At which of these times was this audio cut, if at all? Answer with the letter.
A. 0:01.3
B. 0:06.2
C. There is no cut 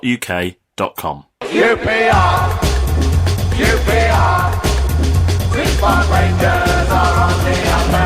A